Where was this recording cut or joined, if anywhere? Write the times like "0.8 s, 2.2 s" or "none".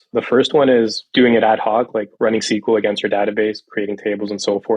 1.0 s

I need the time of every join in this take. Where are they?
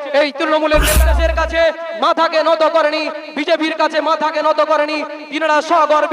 1.0 s

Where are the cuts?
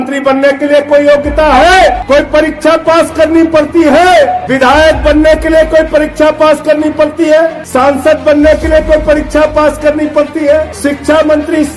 2.0 s, 4.4 s, 7.6 s, 10.7 s

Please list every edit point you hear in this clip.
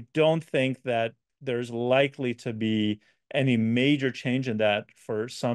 none

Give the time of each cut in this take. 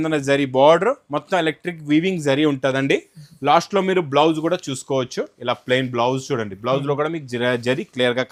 none

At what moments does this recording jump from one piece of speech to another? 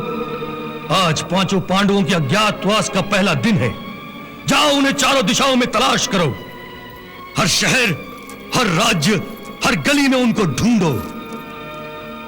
none

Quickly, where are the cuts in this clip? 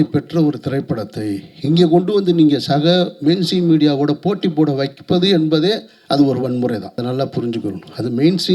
7.0 s

